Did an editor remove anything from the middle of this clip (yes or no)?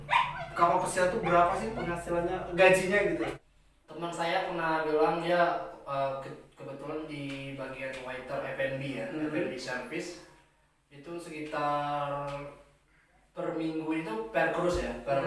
yes